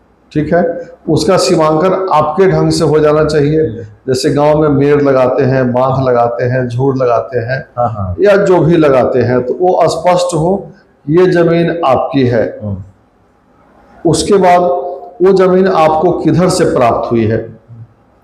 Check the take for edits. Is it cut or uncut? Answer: uncut